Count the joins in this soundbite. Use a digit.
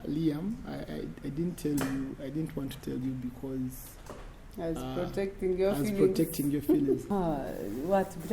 1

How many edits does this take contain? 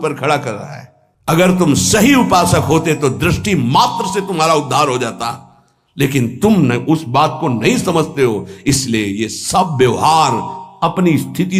0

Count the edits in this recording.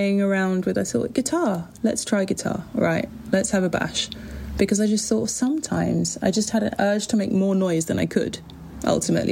0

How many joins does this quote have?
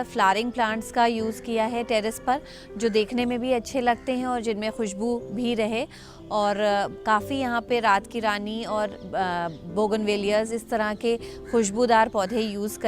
0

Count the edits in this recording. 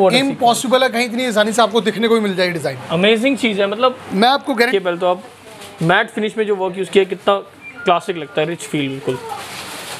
1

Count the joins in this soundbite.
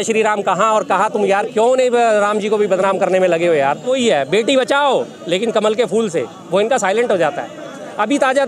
1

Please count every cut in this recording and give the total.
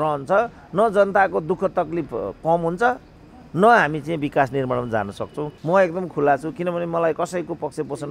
1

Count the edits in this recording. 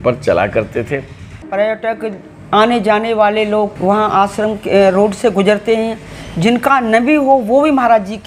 2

